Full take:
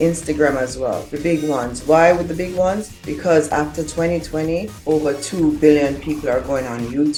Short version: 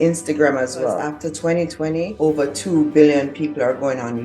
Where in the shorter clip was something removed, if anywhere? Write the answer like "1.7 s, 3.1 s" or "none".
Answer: 1.1 s, 2.1 s

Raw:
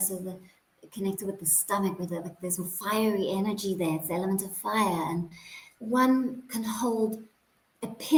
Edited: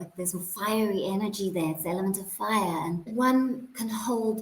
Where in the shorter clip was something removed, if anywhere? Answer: 3.1 s

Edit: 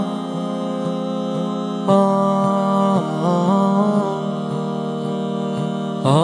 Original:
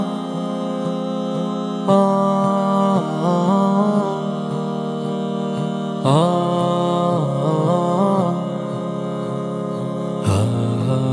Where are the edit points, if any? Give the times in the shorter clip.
none

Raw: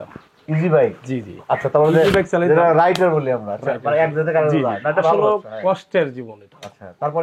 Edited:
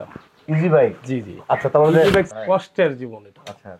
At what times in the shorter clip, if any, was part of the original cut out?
2.3 s

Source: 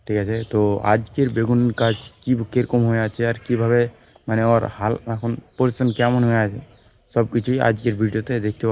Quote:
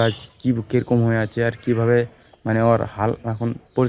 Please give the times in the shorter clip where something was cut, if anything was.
none

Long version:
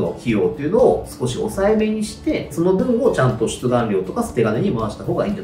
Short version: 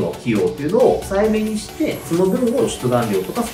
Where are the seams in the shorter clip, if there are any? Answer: 1.1 s, 2.6 s

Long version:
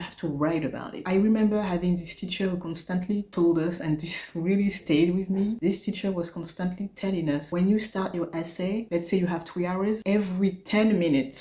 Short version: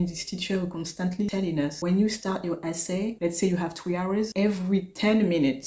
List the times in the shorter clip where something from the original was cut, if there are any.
1.3 s

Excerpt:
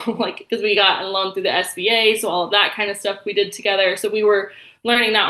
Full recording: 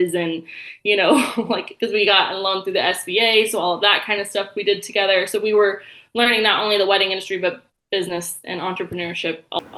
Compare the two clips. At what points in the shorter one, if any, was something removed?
none

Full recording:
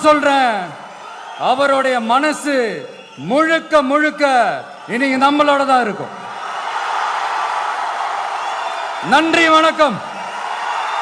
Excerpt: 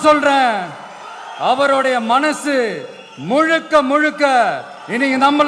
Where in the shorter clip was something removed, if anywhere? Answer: none

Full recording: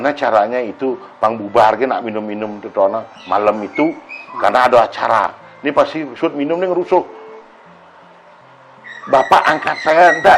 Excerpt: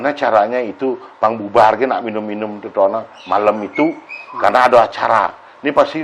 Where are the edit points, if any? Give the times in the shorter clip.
none

